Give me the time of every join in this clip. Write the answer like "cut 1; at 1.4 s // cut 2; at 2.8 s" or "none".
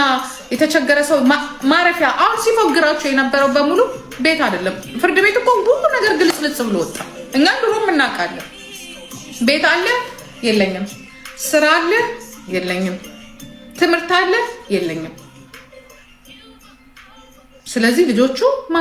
none